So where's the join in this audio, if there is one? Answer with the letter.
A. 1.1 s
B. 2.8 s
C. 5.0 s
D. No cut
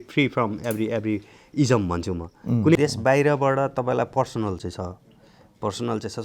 B